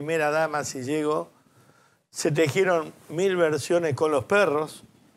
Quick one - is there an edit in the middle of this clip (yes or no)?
no